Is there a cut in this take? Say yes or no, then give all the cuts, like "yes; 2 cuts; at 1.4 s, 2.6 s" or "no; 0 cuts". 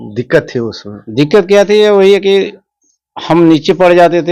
no; 0 cuts